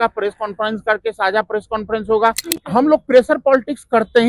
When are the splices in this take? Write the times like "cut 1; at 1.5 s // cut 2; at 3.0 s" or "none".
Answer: cut 1; at 2.5 s